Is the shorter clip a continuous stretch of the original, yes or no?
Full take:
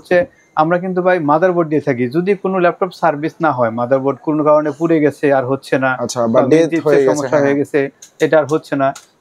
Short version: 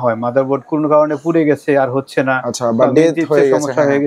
yes